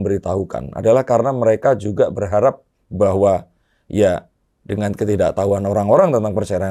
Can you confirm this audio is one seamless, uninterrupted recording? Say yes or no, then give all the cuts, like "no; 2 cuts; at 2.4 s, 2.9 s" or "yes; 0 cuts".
yes; 0 cuts